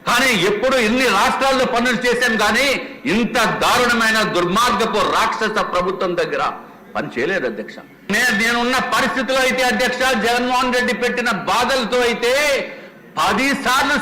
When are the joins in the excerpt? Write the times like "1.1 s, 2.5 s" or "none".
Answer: 8.1 s